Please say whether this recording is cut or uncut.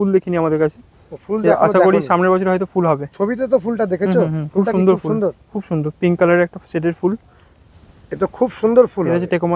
cut